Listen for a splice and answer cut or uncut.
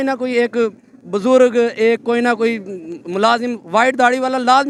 uncut